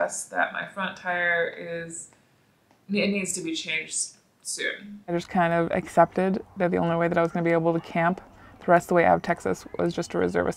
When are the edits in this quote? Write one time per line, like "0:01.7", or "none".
0:05.1